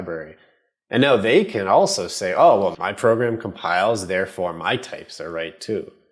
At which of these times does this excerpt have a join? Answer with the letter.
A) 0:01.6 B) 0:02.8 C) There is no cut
B